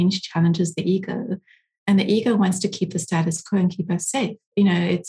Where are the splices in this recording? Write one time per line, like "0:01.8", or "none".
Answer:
none